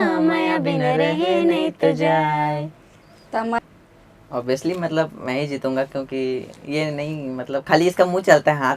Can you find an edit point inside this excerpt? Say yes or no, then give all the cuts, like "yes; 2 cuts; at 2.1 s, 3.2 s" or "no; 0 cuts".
yes; 1 cut; at 3.6 s